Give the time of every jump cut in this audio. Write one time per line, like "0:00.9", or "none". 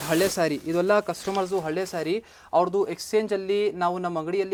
none